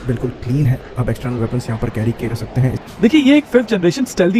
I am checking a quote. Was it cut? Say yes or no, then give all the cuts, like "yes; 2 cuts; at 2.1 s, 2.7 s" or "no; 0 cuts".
yes; 1 cut; at 2.8 s